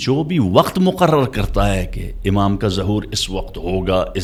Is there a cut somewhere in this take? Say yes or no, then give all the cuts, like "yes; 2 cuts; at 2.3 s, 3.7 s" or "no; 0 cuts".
no; 0 cuts